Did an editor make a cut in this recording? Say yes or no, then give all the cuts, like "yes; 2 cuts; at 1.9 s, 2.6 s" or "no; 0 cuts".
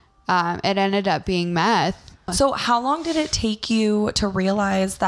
yes; 1 cut; at 2.3 s